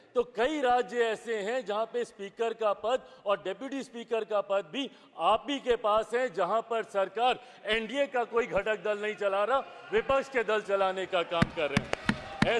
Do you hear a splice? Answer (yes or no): no